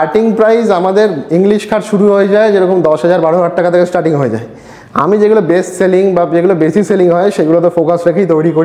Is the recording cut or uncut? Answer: uncut